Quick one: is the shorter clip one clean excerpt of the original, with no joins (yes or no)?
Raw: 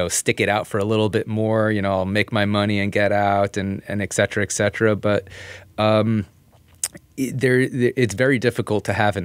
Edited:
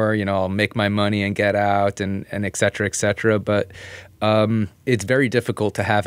no